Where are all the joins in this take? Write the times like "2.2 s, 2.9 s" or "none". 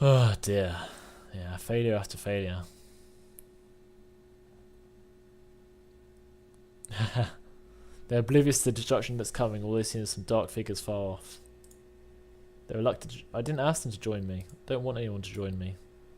5.2 s

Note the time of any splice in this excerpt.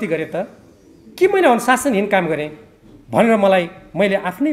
none

